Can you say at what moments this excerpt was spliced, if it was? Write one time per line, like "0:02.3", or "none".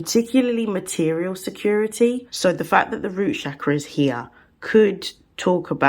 0:02.3